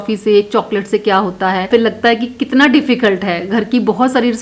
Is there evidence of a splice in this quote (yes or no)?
no